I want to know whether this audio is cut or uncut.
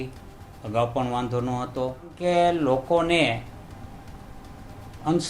cut